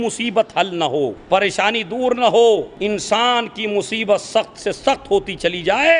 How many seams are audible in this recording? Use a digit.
2